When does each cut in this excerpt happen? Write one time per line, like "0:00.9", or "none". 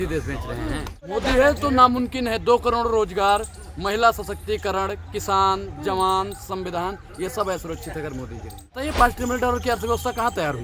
0:01.1
0:08.8